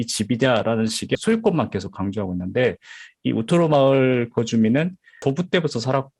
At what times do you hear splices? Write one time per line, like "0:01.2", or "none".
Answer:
0:01.1
0:05.2